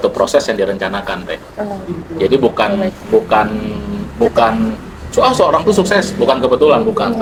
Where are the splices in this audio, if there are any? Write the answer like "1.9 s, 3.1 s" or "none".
none